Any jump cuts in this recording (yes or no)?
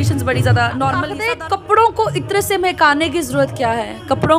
yes